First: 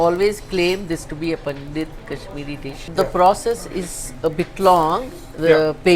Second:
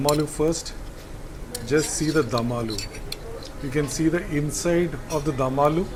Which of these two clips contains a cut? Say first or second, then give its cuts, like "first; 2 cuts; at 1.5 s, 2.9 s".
first; 1 cut; at 2.8 s